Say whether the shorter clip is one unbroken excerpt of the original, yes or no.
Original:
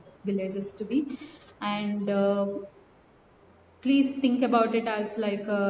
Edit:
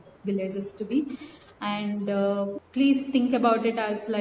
no